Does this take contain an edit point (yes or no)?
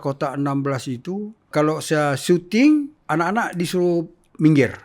yes